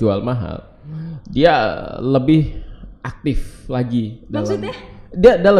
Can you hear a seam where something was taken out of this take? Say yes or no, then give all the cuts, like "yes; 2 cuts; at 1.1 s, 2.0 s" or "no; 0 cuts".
no; 0 cuts